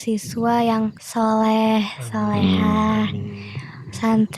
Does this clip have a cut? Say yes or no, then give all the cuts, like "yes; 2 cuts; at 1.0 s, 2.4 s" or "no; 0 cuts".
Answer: yes; 1 cut; at 1.0 s